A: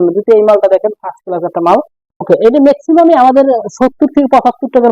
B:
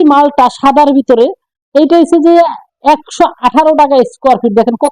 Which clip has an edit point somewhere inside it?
A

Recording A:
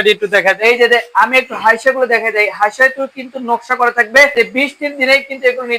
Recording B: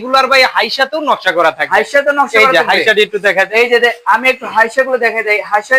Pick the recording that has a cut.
A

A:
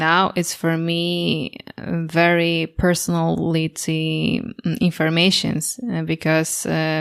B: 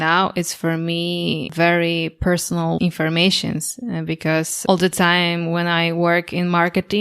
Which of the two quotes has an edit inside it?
B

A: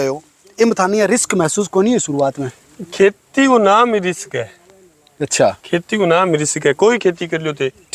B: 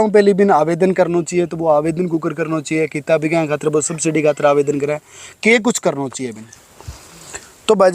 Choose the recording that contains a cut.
B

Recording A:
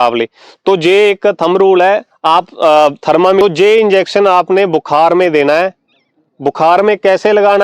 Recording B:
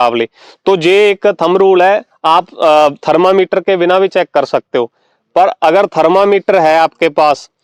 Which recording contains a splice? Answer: A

